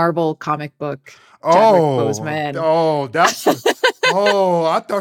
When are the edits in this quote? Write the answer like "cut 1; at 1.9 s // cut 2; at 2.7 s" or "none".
cut 1; at 1.5 s